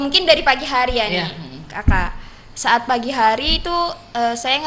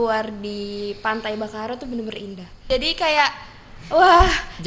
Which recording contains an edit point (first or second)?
second